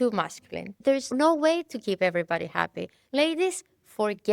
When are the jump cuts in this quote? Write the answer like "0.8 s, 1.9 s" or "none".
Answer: 1.1 s, 3.0 s